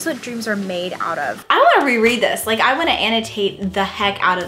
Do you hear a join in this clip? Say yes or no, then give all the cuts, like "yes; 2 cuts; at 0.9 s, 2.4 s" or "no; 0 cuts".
yes; 1 cut; at 1.3 s